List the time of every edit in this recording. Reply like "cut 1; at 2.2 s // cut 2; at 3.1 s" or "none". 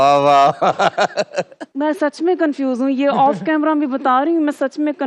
cut 1; at 1.6 s